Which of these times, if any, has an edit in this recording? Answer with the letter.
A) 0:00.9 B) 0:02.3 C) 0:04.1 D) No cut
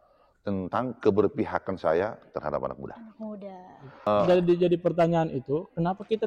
C